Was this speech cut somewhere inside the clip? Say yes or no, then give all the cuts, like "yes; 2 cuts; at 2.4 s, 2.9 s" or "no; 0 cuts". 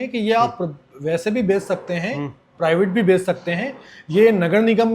no; 0 cuts